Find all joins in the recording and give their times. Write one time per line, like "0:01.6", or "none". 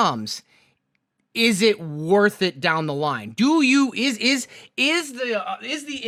none